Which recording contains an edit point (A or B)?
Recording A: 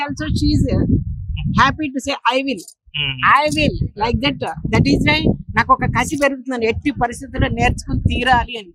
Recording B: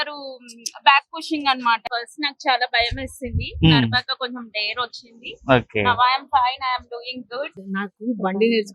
B